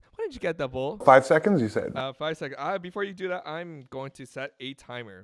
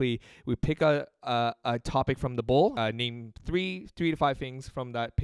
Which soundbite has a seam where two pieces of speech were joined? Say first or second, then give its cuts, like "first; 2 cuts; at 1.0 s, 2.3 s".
second; 1 cut; at 2.7 s